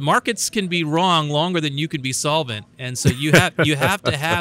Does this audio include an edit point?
no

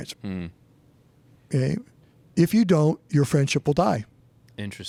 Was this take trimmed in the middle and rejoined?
no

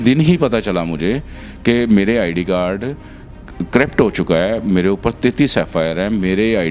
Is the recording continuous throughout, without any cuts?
yes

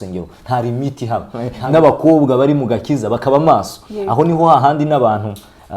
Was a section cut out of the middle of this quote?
yes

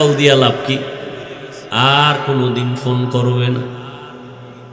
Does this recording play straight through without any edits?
yes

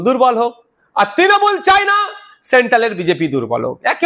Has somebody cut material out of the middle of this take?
no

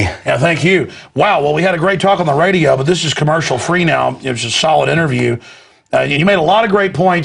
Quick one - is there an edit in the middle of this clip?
no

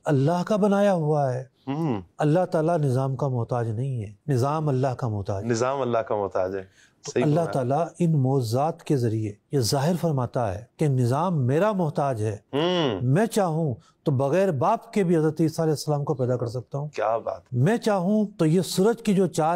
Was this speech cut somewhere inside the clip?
no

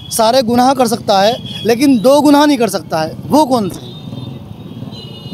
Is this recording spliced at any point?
no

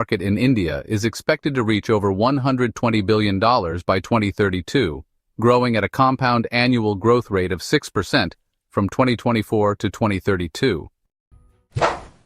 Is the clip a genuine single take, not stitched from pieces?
no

